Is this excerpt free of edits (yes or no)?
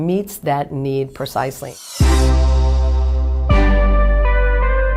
no